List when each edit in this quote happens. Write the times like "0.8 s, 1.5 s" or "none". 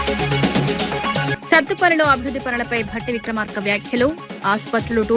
1.3 s

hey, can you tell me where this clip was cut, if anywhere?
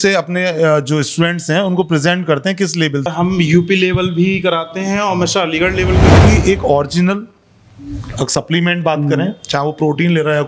3.0 s, 6.1 s

